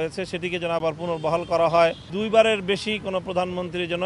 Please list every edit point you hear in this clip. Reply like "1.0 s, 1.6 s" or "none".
2.1 s